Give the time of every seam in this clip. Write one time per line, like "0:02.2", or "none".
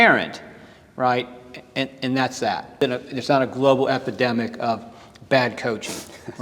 0:02.8